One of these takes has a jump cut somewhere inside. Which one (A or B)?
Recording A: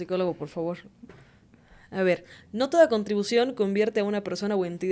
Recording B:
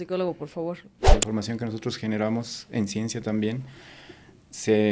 B